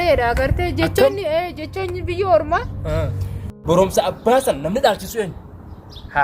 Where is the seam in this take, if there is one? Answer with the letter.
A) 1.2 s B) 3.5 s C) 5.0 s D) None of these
B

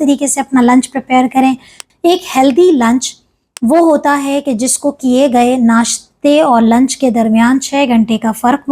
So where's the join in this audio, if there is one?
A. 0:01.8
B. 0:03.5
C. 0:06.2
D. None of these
A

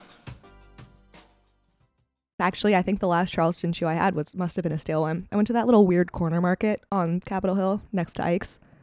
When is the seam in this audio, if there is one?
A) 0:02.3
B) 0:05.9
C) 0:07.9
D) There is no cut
A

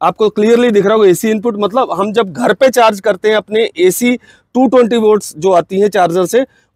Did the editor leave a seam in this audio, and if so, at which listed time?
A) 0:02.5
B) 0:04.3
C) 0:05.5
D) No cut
D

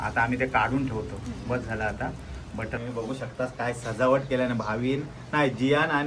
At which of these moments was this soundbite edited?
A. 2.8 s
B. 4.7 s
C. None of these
A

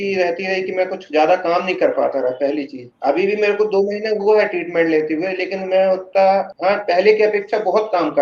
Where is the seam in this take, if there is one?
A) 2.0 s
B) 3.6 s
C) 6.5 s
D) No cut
C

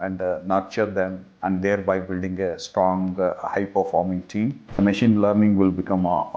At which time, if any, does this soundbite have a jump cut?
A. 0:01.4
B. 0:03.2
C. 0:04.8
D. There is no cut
C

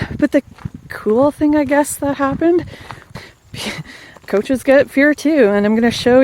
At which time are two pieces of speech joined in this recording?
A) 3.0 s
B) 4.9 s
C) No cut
A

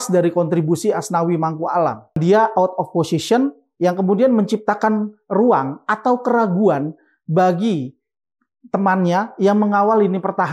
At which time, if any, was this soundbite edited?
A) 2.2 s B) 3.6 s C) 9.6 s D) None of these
A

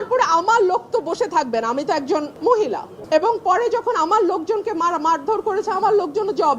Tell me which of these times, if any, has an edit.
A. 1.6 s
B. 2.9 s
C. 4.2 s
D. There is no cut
B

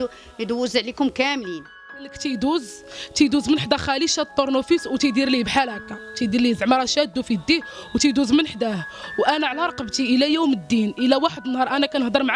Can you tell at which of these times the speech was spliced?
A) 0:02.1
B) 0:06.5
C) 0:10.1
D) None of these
A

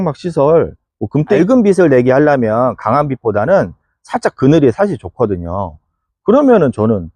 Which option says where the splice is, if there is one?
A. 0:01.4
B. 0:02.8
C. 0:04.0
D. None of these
A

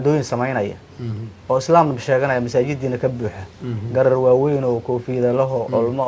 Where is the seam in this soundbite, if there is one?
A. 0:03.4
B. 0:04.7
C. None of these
C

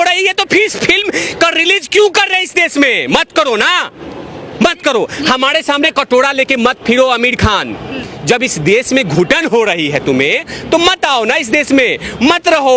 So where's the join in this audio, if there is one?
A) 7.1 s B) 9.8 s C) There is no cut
C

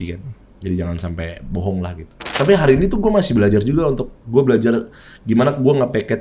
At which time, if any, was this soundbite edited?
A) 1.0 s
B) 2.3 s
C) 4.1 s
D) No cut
B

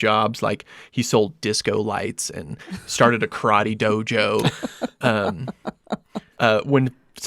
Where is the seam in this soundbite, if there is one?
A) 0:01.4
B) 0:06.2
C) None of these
B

